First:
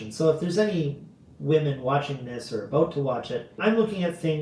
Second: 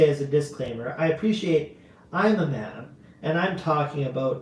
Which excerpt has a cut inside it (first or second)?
first